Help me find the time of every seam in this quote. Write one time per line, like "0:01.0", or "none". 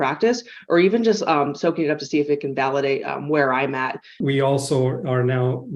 0:04.1